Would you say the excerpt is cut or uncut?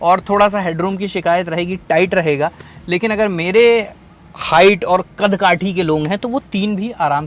uncut